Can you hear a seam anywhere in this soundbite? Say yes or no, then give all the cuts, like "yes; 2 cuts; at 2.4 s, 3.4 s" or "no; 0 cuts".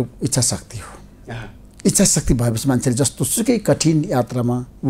no; 0 cuts